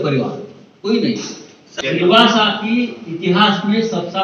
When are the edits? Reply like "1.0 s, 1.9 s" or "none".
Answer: 1.6 s